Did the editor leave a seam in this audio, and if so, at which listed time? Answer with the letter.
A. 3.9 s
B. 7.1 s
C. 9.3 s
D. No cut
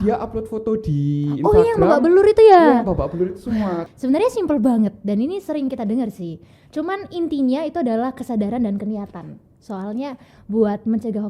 A